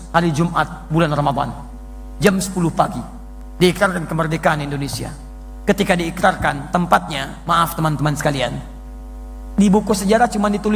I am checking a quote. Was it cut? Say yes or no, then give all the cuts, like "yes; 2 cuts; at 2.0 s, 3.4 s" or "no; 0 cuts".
no; 0 cuts